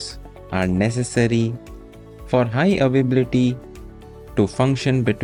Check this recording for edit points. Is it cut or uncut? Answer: uncut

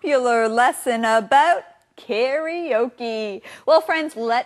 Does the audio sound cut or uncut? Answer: cut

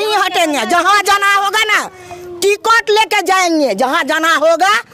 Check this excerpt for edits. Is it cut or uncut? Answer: uncut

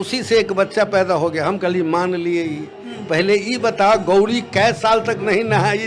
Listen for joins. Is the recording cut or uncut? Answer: uncut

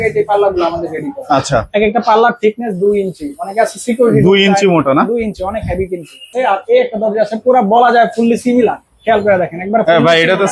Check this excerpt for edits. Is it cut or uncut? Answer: cut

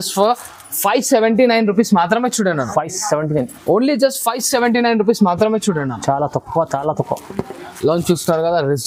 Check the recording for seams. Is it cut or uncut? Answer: uncut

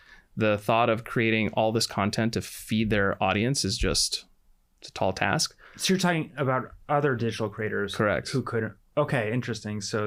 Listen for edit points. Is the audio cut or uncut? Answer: uncut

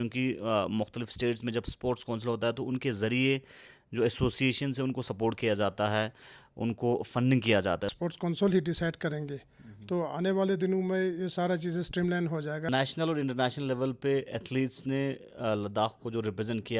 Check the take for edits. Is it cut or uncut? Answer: cut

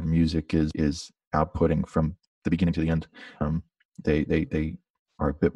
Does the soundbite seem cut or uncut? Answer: uncut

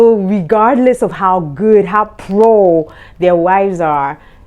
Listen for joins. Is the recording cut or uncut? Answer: uncut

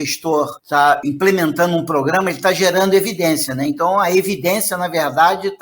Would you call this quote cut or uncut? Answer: cut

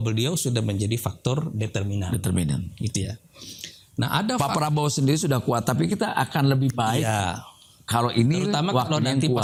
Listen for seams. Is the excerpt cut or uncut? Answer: uncut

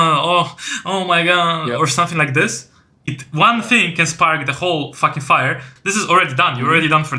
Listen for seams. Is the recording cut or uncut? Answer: cut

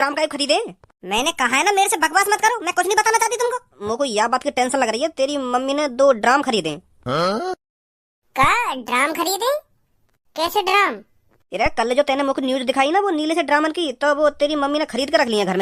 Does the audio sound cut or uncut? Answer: cut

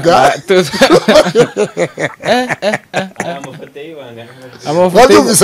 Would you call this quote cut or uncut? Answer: uncut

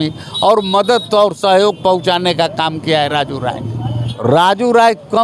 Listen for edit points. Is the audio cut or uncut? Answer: cut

